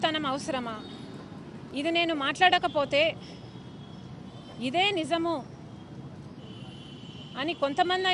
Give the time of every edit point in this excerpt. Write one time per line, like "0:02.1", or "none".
0:01.6